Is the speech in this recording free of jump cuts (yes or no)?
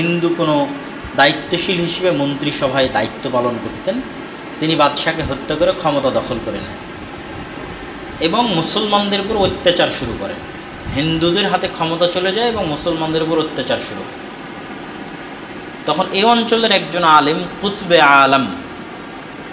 yes